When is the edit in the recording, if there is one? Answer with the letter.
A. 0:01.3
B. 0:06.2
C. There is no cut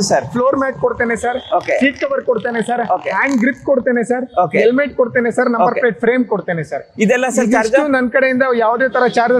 C